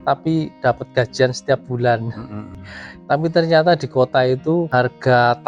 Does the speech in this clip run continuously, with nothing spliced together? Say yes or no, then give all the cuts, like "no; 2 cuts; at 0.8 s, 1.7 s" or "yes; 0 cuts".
no; 2 cuts; at 2.7 s, 4.7 s